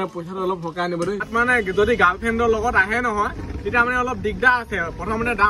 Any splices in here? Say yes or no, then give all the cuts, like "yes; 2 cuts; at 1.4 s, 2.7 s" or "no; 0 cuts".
yes; 1 cut; at 1.2 s